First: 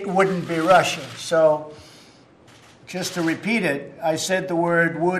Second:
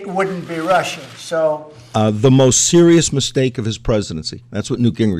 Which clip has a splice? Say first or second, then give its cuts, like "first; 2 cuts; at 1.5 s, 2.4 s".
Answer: second; 1 cut; at 1.7 s